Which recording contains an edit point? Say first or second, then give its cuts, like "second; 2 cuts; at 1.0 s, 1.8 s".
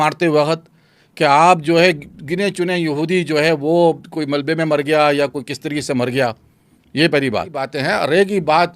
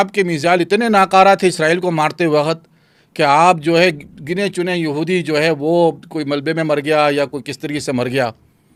first; 1 cut; at 7.7 s